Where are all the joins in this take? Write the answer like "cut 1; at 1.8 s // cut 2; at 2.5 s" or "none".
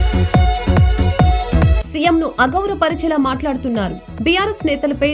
cut 1; at 1.8 s